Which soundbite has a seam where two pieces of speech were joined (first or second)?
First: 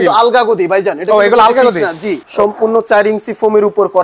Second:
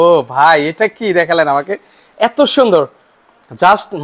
first